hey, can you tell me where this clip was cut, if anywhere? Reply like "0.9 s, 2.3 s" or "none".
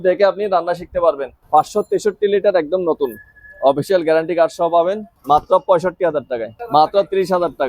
1.3 s, 5.1 s, 6.5 s